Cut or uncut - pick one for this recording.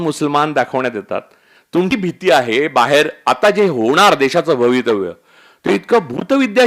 cut